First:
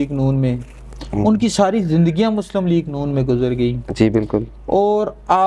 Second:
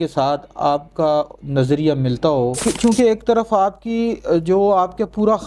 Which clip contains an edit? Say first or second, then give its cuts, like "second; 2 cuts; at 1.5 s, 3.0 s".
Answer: second; 1 cut; at 2.7 s